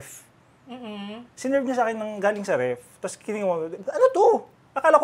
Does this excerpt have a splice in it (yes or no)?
no